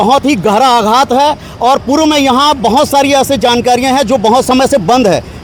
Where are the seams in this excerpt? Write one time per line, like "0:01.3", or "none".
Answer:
none